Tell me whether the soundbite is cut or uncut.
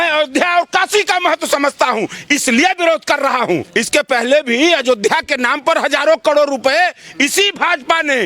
cut